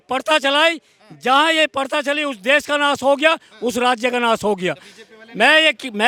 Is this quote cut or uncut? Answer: uncut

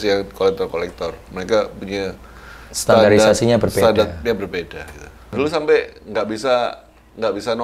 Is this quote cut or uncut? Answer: cut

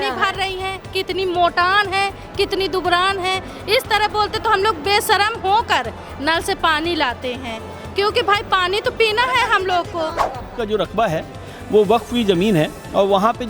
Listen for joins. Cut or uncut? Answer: cut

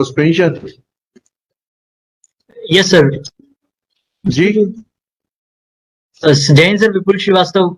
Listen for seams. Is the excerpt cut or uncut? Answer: uncut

